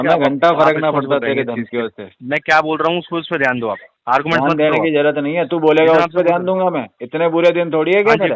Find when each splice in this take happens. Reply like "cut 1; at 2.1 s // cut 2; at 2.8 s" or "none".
cut 1; at 2.1 s